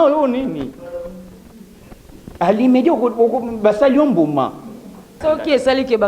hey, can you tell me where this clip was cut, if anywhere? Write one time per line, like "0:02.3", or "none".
0:05.2